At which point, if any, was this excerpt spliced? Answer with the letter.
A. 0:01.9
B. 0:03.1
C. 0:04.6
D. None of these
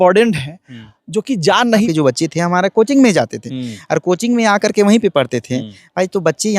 A